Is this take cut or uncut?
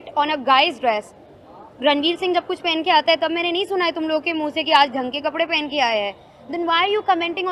uncut